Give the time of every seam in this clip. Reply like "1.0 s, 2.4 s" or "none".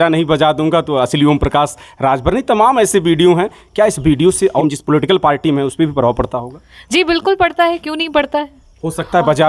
4.6 s